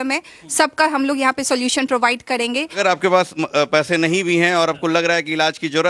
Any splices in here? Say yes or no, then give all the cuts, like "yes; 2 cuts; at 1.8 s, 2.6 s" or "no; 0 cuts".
yes; 1 cut; at 2.8 s